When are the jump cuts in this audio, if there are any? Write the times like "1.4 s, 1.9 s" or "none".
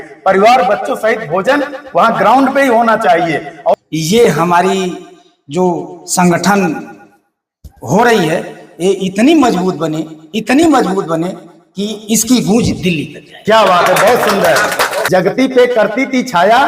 3.8 s, 15.0 s